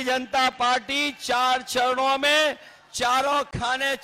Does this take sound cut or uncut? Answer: uncut